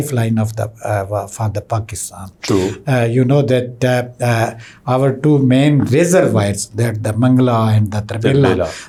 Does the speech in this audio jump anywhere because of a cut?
no; 0 cuts

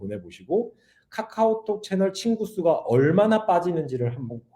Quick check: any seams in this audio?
no; 0 cuts

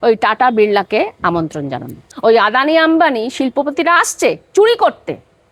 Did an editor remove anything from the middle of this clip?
yes; 1 cut; at 2.0 s

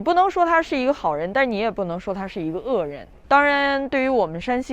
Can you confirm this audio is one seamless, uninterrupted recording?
no; 1 cut; at 3.1 s

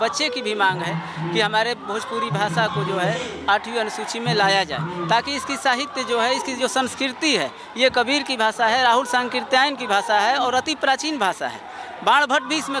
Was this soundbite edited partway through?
no; 0 cuts

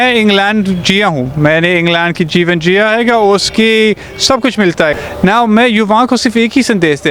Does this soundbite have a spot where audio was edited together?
yes; 1 cut; at 4.9 s

